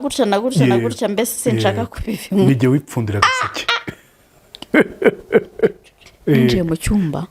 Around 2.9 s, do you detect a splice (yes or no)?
no